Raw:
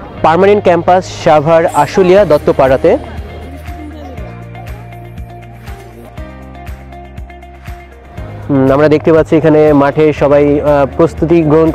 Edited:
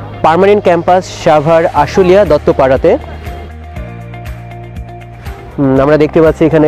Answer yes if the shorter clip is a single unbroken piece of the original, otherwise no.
no